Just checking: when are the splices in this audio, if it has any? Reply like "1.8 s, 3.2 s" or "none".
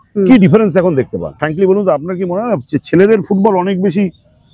1.4 s